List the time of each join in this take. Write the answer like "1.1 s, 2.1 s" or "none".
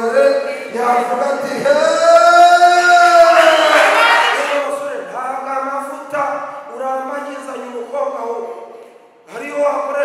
4.3 s